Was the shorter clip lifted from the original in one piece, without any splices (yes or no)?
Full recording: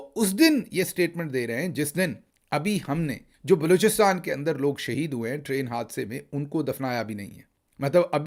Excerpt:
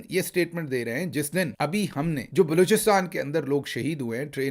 no